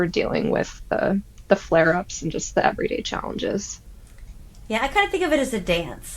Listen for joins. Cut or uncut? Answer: uncut